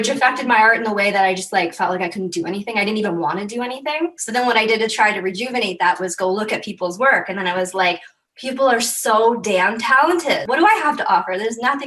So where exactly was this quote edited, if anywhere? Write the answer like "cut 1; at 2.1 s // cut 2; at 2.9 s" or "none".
cut 1; at 4.2 s // cut 2; at 10.4 s